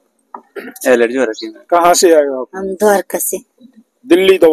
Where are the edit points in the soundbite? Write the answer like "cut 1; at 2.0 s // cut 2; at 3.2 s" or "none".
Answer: cut 1; at 1.5 s